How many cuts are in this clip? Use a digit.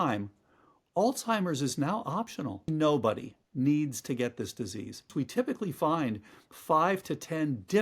2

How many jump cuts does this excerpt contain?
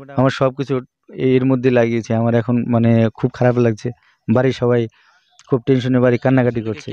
0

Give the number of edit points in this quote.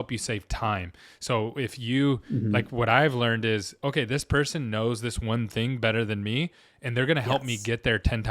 0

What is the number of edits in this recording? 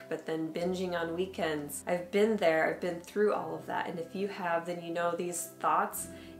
1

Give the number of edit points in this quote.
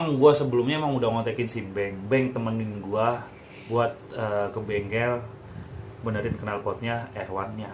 0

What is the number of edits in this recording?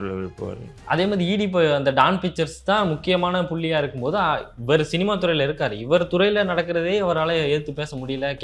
0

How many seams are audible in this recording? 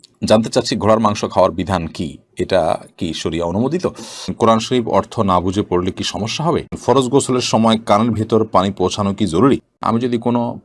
3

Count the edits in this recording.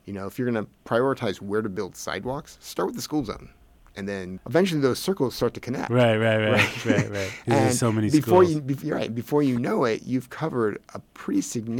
1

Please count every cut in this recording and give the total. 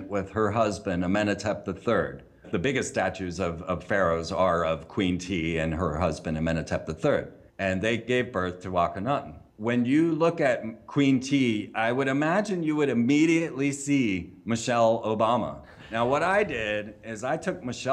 1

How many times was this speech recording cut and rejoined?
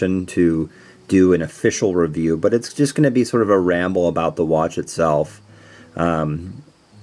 1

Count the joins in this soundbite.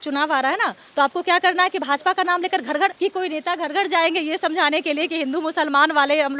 1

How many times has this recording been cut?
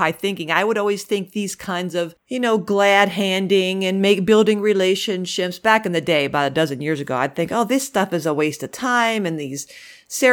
1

